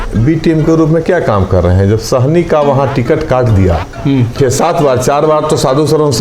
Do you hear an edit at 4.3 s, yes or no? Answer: yes